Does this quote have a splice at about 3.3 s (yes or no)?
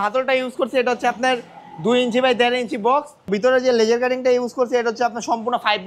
yes